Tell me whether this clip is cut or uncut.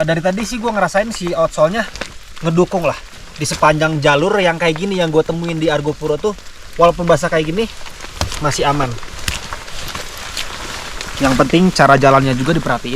uncut